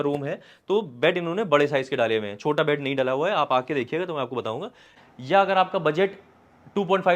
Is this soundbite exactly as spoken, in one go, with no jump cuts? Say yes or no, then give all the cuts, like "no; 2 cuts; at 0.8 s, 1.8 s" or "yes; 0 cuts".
no; 1 cut; at 4.9 s